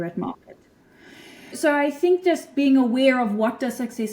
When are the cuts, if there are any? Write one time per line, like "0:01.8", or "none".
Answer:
0:01.5